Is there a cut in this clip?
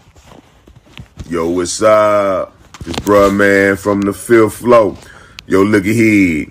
no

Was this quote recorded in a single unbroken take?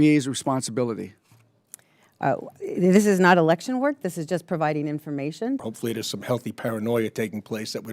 no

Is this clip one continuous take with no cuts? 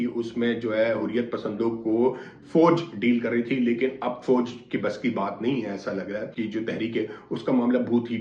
yes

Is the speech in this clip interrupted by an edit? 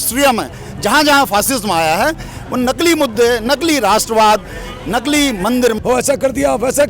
yes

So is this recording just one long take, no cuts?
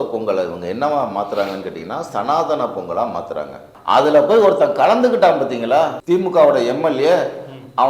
no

